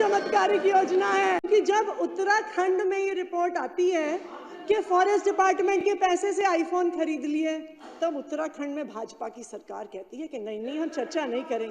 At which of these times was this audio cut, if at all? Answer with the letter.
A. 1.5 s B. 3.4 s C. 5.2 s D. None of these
A